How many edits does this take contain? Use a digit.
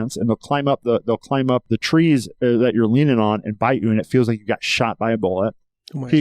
1